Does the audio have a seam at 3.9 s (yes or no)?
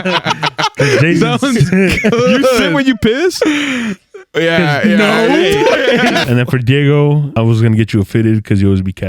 no